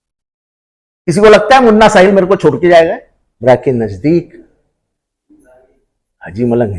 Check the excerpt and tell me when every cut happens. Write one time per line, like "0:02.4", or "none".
0:03.4